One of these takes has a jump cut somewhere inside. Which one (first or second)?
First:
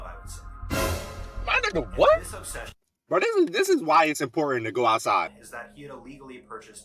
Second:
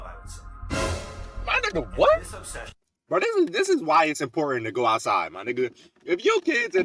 first